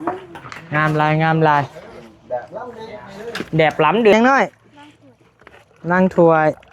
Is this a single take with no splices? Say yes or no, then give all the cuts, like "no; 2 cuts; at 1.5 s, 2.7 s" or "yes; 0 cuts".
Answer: no; 1 cut; at 4.1 s